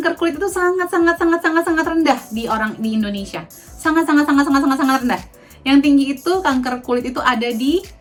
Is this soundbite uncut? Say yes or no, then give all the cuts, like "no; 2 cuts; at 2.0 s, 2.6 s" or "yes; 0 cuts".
yes; 0 cuts